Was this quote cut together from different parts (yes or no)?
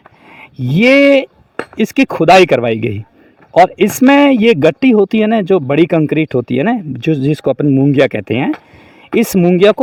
no